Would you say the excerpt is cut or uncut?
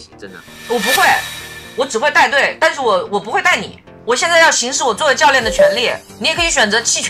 cut